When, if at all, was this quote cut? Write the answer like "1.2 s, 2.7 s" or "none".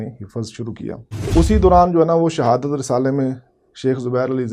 1.3 s